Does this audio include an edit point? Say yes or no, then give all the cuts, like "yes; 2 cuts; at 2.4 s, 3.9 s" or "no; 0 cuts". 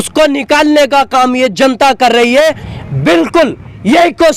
yes; 1 cut; at 2.7 s